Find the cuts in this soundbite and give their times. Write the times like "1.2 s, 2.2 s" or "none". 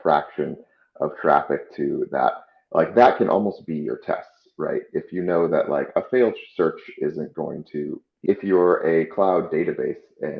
8.1 s